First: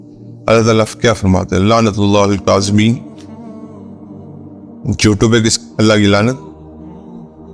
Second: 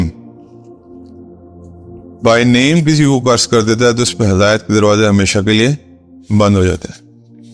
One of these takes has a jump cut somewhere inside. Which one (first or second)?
first